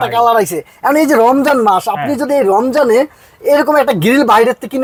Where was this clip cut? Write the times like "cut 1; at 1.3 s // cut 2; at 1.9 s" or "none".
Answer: none